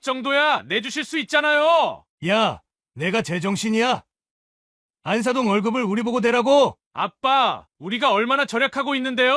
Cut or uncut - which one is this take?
cut